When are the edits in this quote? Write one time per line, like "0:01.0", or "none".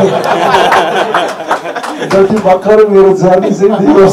none